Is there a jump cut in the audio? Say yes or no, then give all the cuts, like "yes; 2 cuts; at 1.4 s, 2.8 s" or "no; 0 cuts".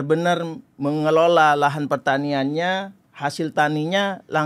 no; 0 cuts